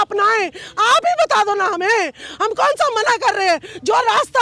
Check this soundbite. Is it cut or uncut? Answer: uncut